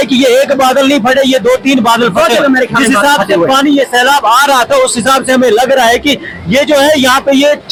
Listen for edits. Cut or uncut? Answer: uncut